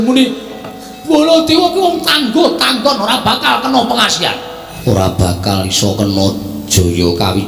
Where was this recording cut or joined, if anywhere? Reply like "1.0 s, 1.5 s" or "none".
4.7 s